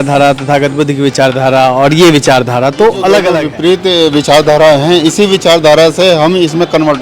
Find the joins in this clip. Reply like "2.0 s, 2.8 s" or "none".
3.5 s